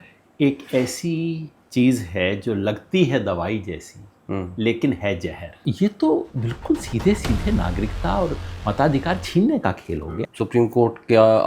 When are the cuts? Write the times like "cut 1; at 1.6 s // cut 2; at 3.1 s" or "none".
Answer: cut 1; at 1.5 s // cut 2; at 5.6 s // cut 3; at 10.1 s